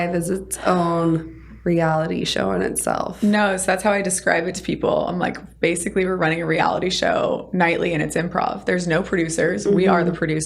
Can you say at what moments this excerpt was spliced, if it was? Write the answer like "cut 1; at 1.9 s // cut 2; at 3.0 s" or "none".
none